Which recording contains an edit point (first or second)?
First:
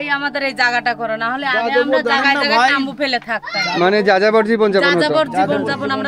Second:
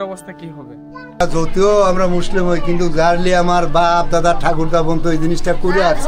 second